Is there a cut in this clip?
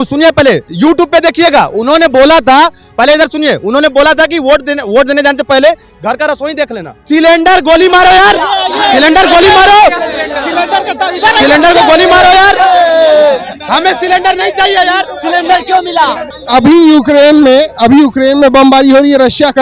no; 0 cuts

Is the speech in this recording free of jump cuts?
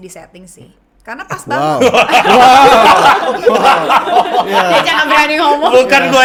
yes; 0 cuts

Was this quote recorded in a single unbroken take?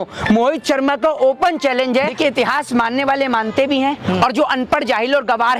no; 1 cut; at 2.2 s

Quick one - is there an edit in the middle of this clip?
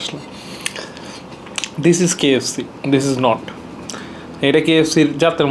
no; 0 cuts

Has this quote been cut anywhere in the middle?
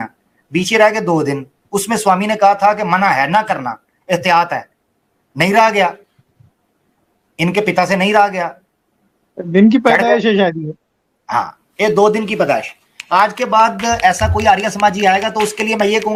no; 0 cuts

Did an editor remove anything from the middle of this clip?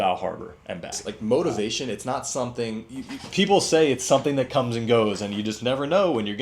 yes; 1 cut; at 1.0 s

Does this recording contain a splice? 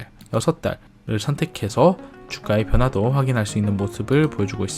no; 0 cuts

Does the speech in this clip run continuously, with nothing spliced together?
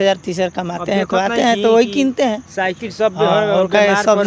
yes; 0 cuts

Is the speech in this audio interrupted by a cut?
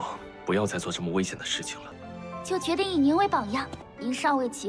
no; 0 cuts

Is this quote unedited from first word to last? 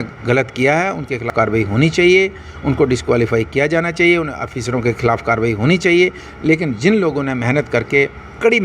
no; 1 cut; at 1.3 s

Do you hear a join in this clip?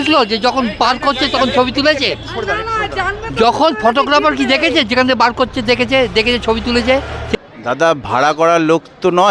yes; 1 cut; at 7.3 s

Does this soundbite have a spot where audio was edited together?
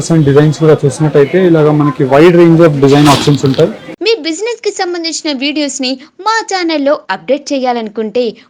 yes; 1 cut; at 3.9 s

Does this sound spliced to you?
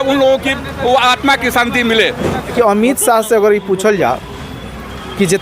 yes; 1 cut; at 2.5 s

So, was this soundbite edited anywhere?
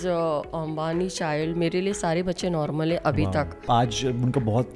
yes; 1 cut; at 3.6 s

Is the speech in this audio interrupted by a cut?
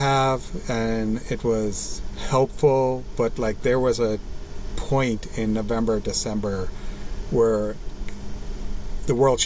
no; 0 cuts

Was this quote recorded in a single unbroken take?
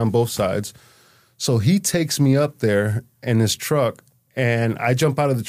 yes; 0 cuts

